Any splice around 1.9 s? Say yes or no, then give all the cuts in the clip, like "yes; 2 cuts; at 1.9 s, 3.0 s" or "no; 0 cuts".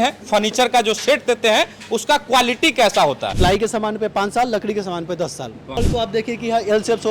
no; 2 cuts; at 3.3 s, 5.5 s